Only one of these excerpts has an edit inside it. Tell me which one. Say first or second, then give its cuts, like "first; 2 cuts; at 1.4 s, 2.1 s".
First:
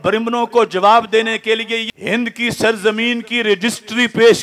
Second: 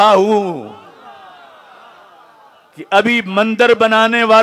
first; 1 cut; at 1.9 s